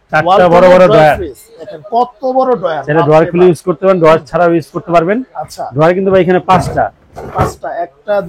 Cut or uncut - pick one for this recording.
uncut